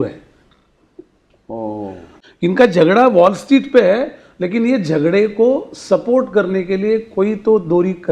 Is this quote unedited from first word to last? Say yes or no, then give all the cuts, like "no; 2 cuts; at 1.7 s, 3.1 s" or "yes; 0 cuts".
no; 1 cut; at 2.1 s